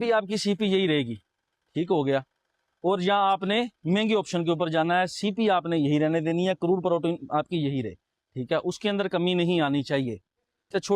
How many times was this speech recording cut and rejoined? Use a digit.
0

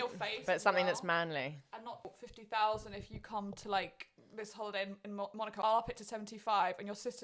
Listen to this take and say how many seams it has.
2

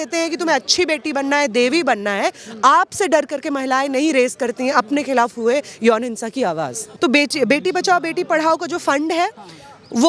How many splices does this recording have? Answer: 1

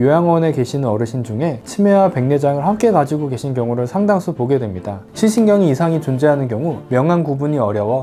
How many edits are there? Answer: 1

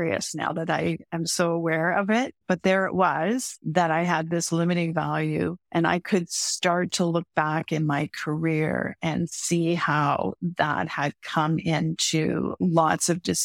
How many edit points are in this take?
2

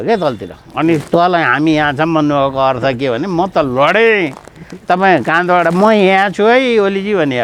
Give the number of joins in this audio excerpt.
0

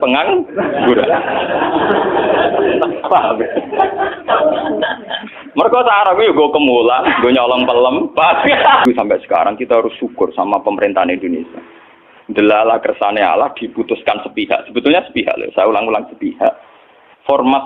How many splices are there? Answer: 1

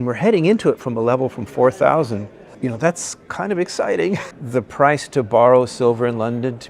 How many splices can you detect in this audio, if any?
2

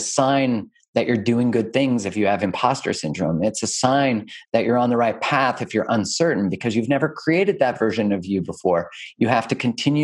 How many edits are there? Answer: 0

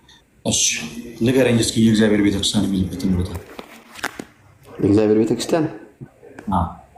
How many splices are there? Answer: 0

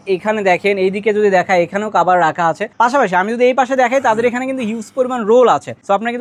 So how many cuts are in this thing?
0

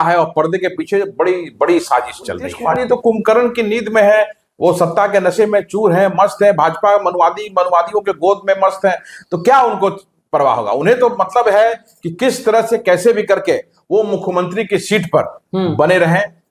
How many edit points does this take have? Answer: 1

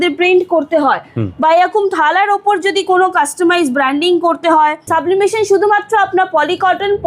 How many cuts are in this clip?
1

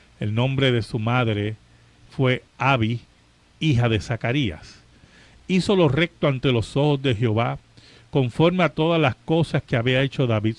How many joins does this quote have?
1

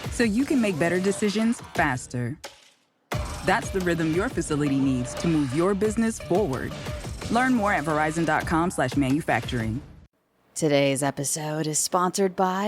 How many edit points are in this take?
1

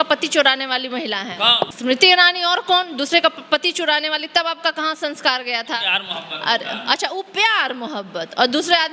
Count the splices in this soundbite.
1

